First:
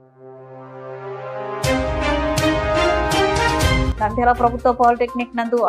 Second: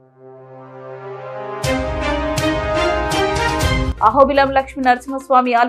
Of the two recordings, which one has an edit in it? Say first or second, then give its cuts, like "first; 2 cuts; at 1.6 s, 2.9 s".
first; 1 cut; at 3.9 s